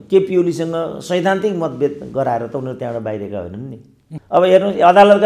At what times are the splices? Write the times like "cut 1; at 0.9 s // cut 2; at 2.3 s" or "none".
cut 1; at 4.1 s